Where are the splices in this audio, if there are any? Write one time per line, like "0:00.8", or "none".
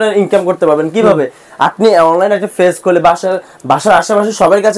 none